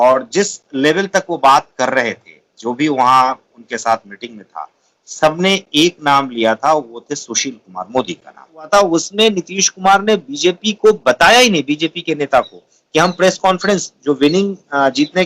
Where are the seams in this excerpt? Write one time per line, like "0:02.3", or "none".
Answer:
0:08.7